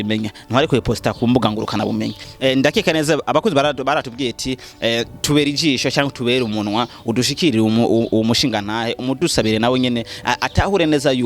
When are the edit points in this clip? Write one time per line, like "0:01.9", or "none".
0:02.2